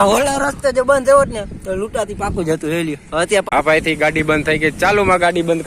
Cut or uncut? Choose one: cut